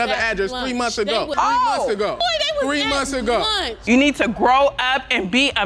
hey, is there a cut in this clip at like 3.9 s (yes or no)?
yes